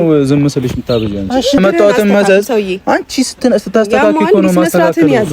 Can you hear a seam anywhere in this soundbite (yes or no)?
yes